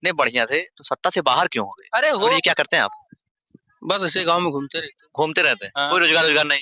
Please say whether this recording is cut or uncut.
cut